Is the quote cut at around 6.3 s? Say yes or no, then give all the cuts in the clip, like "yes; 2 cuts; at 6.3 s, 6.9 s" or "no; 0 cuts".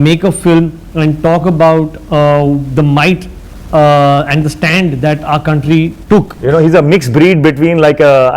yes; 1 cut; at 6.3 s